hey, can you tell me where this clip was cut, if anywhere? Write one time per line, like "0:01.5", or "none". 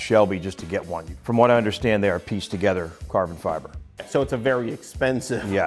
0:01.0
0:03.9